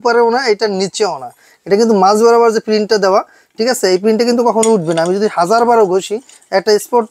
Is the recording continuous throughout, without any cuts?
yes; 0 cuts

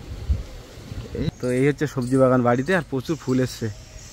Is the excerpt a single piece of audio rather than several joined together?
no; 1 cut; at 1.3 s

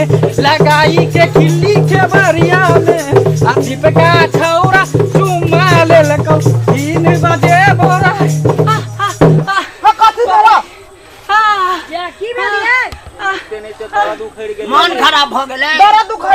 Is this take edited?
yes; 1 cut; at 3.5 s

